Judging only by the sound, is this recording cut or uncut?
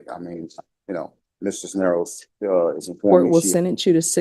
cut